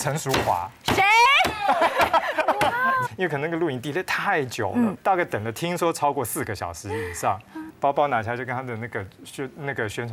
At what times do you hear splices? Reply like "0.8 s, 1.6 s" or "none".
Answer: 3.0 s, 7.6 s